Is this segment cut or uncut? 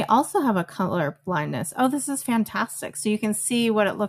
uncut